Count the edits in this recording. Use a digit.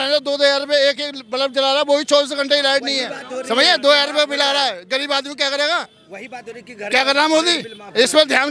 0